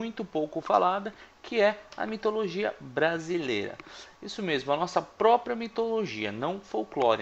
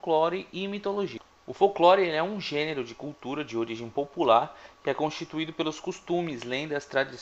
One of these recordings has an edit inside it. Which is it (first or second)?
first